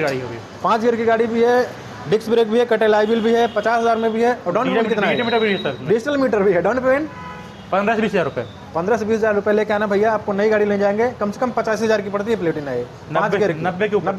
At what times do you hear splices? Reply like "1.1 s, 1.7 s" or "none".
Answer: none